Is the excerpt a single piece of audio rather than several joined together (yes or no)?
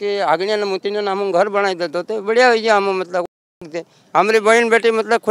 yes